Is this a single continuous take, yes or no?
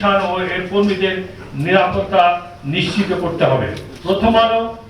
no